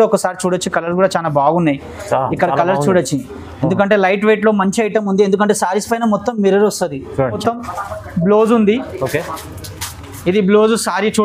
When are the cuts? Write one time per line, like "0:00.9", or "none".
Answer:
0:07.4

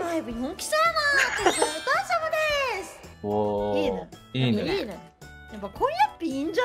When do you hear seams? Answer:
none

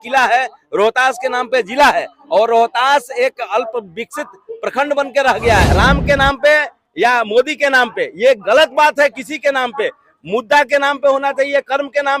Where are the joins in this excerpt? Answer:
0:05.7

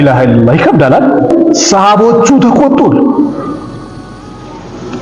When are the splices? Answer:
0:01.3

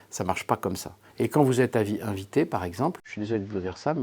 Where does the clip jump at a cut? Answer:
0:01.0

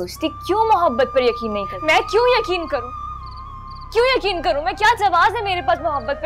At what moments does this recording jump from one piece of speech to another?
none

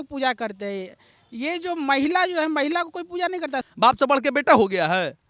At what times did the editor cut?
0:03.6

